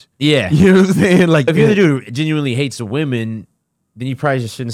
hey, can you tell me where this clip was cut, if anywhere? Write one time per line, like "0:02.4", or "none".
0:01.5